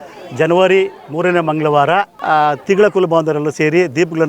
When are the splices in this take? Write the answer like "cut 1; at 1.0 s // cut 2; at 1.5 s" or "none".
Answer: cut 1; at 2.1 s